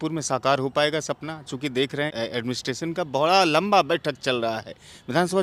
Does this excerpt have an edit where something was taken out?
no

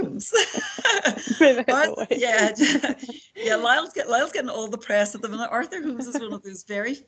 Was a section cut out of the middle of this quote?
no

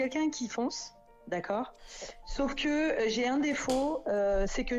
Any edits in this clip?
no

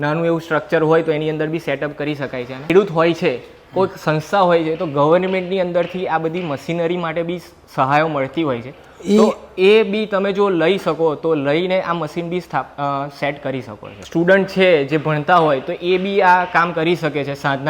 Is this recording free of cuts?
no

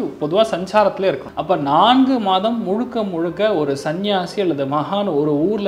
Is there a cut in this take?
yes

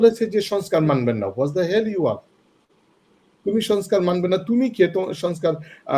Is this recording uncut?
yes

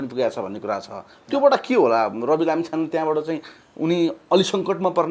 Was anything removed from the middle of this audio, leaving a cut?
no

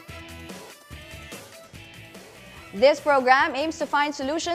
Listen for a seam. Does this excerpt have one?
no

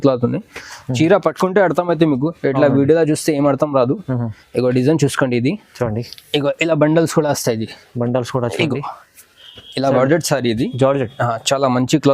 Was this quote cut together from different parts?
yes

